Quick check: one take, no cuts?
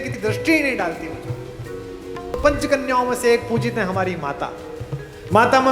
no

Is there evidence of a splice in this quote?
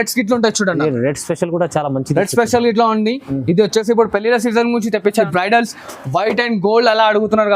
yes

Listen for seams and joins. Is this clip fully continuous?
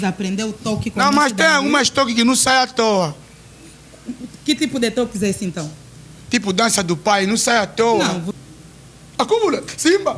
no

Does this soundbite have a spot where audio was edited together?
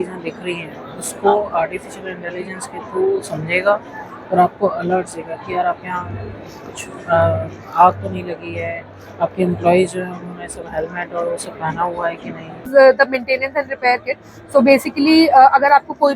yes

